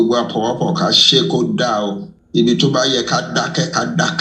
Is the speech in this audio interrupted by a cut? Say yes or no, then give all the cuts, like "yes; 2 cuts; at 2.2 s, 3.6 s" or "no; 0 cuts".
yes; 1 cut; at 2.1 s